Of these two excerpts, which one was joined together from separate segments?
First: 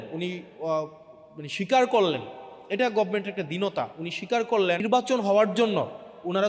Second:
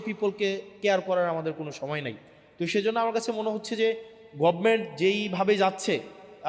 first; 1 cut; at 4.8 s

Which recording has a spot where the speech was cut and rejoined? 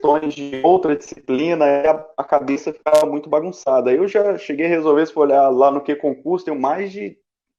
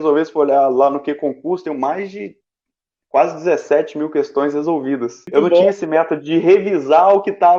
second; 1 cut; at 5.2 s

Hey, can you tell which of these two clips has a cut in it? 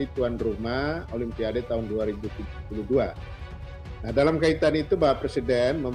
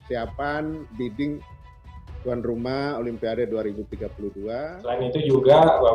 second; 1 cut; at 4.7 s

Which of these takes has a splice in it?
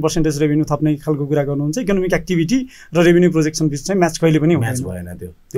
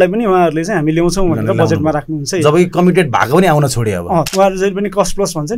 second; 1 cut; at 4.3 s

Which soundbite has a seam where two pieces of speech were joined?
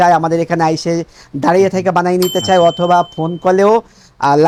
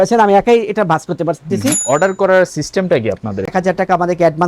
second; 2 cuts; at 1.8 s, 3.5 s

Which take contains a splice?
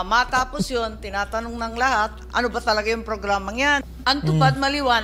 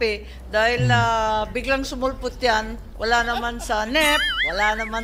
first; 1 cut; at 3.9 s

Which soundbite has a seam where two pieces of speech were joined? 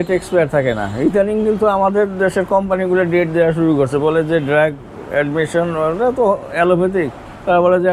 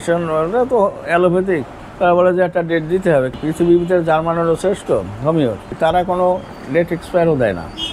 second; 2 cuts; at 3.4 s, 5.7 s

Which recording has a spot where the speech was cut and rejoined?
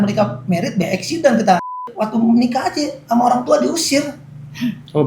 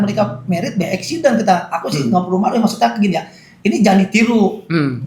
first; 1 cut; at 1.9 s

